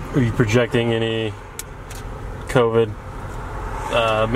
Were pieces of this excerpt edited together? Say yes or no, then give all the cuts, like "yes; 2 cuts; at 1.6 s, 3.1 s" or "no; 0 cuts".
no; 0 cuts